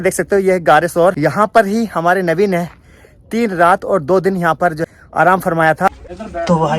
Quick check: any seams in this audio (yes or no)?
yes